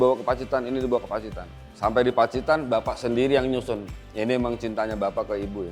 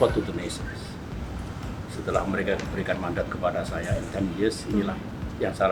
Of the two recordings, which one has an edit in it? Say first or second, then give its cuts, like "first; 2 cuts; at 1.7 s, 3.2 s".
first; 1 cut; at 3.9 s